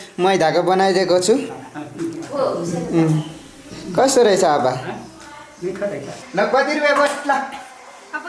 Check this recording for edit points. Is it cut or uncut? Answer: cut